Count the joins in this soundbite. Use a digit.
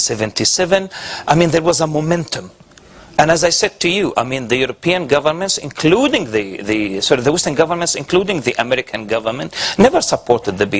1